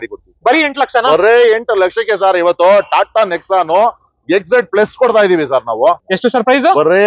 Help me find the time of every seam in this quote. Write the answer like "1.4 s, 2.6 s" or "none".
6.0 s